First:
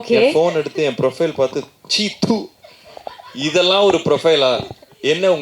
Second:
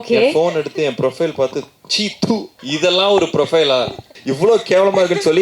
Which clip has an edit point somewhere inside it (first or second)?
second